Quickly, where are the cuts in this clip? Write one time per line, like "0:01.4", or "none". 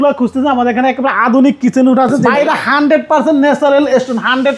0:02.3